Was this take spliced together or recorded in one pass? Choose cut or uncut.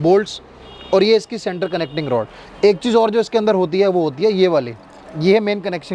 uncut